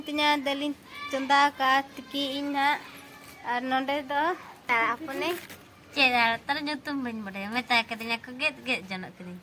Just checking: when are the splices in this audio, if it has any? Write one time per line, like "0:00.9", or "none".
0:04.6

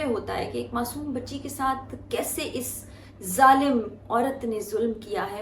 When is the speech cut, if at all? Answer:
none

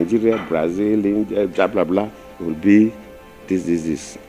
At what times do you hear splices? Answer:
none

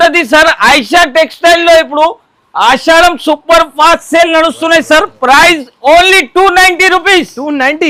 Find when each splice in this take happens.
none

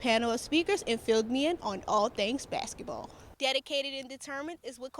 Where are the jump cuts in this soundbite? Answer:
0:03.2

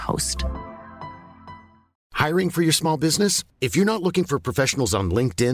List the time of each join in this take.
0:02.0

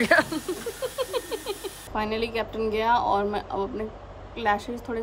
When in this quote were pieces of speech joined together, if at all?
0:01.7

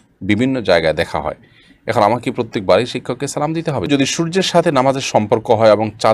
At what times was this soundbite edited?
0:03.9

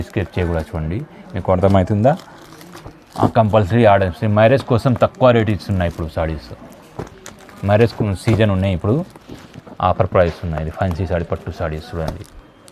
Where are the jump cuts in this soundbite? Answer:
none

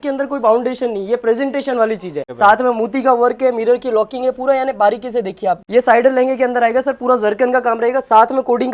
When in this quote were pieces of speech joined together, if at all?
0:02.2
0:05.6

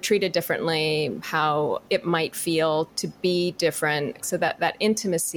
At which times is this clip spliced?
0:01.8
0:02.9
0:04.2

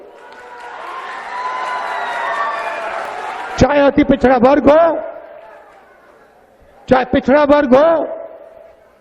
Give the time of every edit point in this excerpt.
0:03.1

